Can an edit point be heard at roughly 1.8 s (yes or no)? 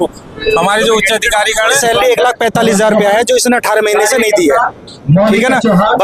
yes